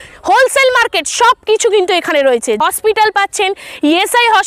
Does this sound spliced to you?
yes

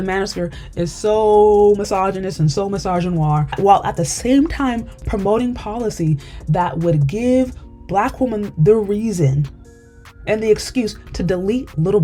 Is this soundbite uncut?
yes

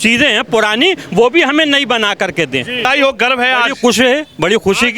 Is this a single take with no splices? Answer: no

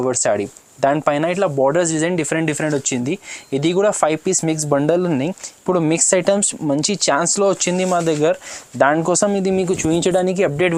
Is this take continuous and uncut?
yes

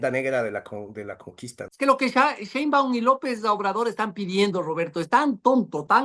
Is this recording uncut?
no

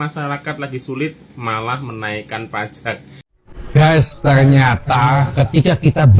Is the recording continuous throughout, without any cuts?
no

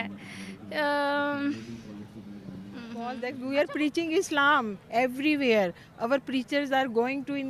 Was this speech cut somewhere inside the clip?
yes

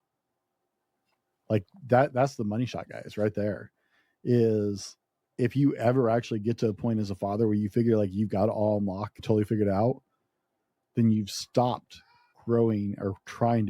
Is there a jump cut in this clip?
yes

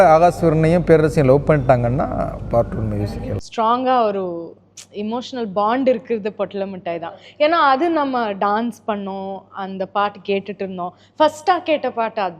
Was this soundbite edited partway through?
yes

